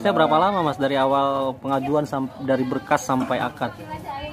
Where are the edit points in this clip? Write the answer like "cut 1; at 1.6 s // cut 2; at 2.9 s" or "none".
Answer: none